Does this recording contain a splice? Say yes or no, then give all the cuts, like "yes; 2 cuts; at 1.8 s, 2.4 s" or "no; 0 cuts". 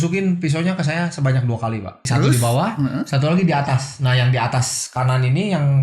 yes; 1 cut; at 2.0 s